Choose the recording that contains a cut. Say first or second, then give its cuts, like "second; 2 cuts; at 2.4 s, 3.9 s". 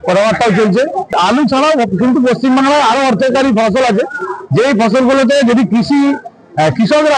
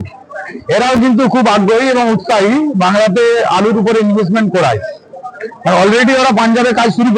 first; 1 cut; at 1.2 s